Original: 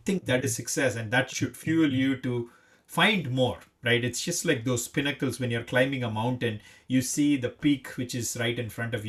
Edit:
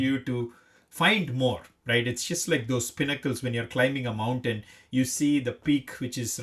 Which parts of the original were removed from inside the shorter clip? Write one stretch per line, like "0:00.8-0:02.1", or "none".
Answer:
none